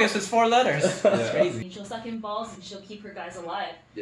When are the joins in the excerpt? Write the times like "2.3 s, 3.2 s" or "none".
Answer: 1.6 s